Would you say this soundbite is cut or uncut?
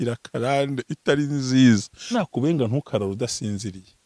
cut